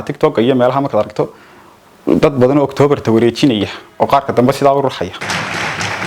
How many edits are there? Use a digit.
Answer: 1